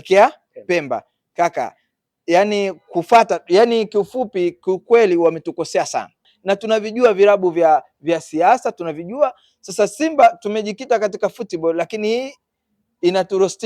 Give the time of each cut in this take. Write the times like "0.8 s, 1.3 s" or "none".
6.3 s